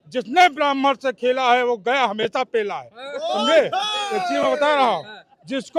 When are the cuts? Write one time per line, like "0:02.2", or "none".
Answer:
none